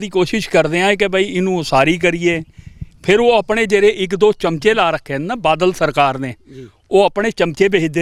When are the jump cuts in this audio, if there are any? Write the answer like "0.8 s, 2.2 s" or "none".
none